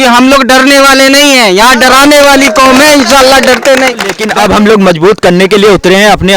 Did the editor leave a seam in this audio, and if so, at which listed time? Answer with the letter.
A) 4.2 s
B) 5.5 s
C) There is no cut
A